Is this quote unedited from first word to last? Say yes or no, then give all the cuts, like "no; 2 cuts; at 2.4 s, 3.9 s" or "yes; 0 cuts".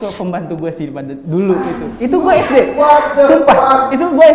yes; 0 cuts